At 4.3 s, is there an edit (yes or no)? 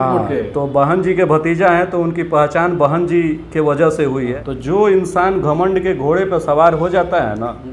yes